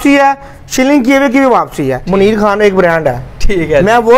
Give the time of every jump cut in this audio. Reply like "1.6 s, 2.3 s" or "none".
2.0 s